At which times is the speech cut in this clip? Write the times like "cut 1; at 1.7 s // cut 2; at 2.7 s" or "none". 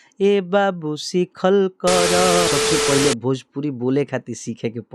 cut 1; at 2.5 s